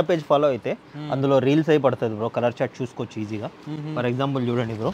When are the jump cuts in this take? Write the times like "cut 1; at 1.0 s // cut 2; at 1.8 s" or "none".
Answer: none

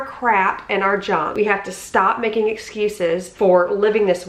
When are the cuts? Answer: cut 1; at 1.3 s // cut 2; at 3.3 s

